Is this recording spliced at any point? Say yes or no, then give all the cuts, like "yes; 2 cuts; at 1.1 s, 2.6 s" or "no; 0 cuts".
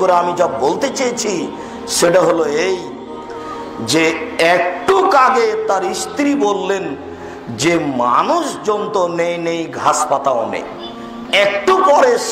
yes; 1 cut; at 11.1 s